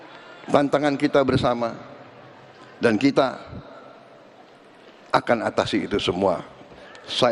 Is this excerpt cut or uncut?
uncut